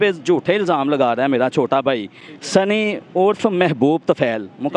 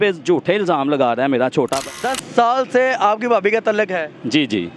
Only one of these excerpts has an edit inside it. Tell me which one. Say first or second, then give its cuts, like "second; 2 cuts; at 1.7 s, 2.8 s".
second; 1 cut; at 1.9 s